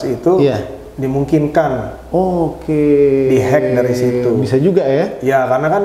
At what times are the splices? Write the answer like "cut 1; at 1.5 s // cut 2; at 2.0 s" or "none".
none